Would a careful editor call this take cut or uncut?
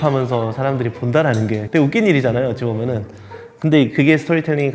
cut